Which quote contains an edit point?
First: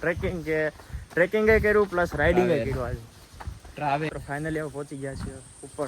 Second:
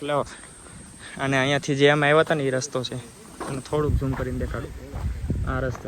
first; 1 cut; at 4.1 s

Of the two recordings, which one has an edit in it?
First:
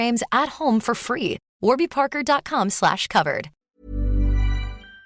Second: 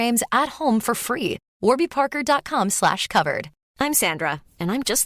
second; 1 cut; at 3.6 s

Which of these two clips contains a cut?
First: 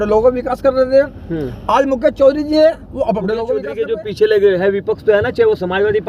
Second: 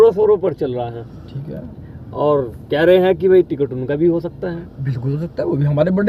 first; 1 cut; at 3.6 s

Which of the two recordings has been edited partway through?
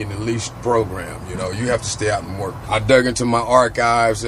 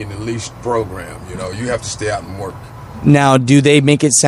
first; 1 cut; at 2.6 s

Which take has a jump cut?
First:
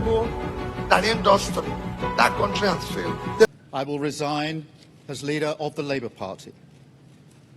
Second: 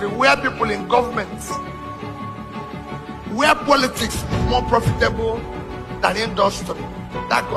first; 1 cut; at 3.5 s

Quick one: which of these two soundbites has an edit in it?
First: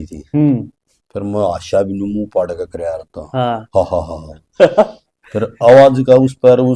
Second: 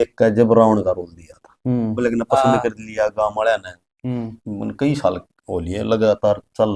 second; 1 cut; at 2.0 s

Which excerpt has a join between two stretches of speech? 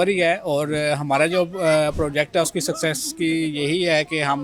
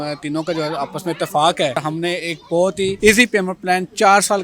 second; 2 cuts; at 1.8 s, 3.0 s

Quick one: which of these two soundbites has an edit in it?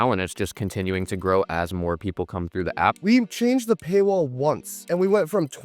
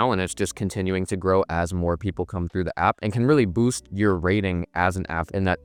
first; 2 cuts; at 3.0 s, 4.7 s

